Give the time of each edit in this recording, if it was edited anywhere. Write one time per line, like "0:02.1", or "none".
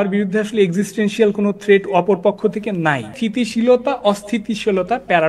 0:03.1